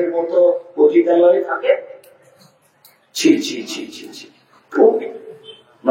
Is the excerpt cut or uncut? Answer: uncut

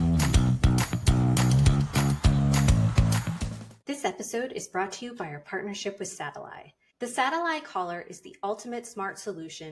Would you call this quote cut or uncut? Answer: cut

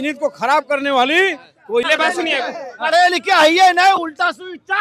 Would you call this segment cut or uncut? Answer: cut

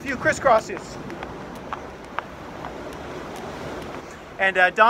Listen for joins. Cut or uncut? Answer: cut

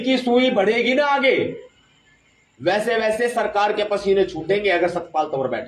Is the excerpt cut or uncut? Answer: uncut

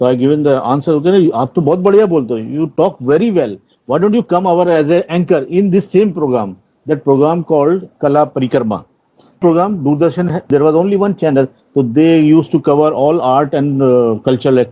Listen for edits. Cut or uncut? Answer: cut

